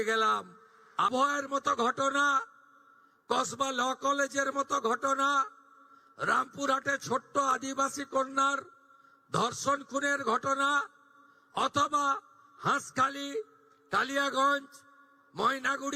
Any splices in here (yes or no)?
yes